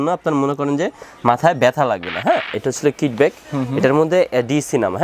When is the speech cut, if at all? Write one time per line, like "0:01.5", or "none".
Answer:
0:02.5